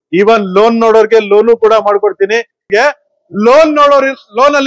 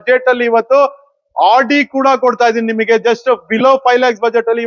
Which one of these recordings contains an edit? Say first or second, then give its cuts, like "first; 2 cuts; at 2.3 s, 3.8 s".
first; 1 cut; at 2.7 s